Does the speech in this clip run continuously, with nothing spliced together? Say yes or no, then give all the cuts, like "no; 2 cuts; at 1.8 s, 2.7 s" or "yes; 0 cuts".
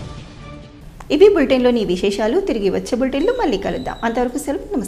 yes; 0 cuts